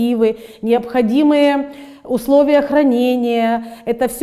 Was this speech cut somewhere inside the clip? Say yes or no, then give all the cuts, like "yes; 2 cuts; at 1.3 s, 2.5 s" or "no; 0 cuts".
no; 0 cuts